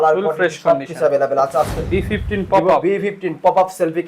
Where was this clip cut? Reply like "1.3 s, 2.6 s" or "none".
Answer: 1.8 s